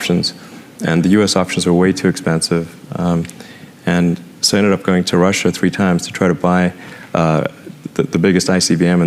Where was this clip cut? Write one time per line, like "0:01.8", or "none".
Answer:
none